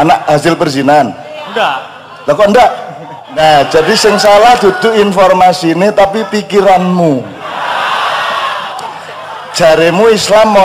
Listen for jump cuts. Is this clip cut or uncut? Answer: cut